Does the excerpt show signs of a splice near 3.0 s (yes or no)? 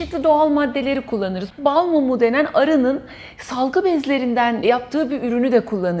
no